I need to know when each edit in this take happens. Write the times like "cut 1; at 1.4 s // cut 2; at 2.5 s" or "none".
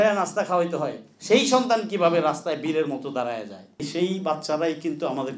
cut 1; at 3.8 s